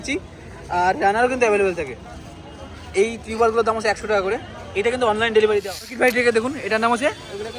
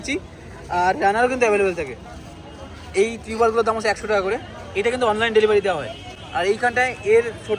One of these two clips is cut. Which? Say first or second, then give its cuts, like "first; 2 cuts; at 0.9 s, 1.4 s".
first; 1 cut; at 5.9 s